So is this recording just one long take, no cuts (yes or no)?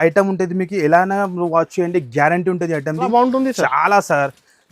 no